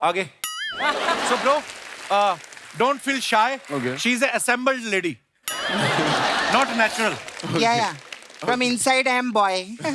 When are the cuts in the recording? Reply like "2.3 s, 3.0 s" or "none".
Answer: 1.3 s

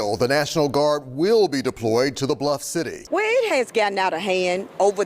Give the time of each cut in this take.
3.0 s

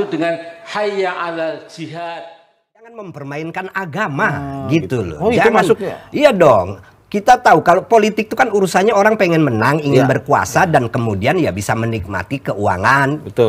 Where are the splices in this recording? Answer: 3.0 s

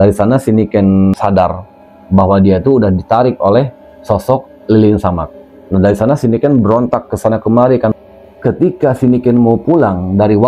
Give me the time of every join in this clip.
1.1 s, 8.0 s

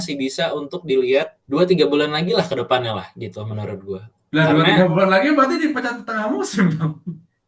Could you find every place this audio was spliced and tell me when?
1.4 s

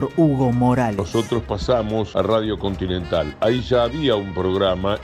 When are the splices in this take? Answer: 1.0 s, 2.1 s

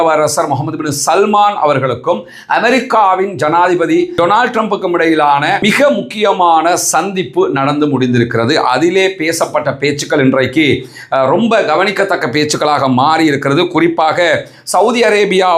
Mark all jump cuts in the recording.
none

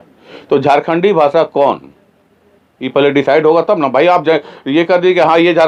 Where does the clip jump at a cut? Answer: none

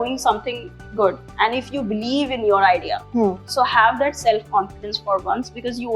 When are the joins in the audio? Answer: 1.2 s, 3.4 s

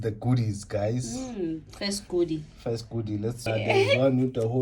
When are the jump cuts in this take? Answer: 3.5 s

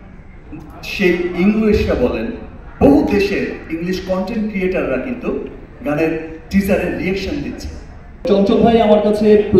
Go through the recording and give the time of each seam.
8.3 s

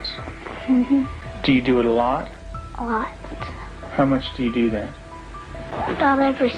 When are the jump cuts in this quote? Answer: 1.2 s, 5.6 s

